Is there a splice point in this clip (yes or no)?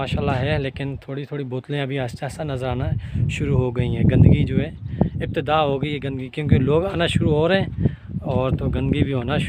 no